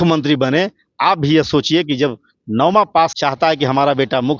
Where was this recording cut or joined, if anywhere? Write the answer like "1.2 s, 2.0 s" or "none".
3.2 s